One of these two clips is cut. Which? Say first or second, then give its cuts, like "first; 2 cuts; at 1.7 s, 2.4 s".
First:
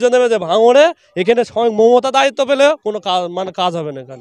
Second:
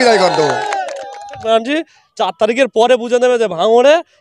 second; 1 cut; at 1.4 s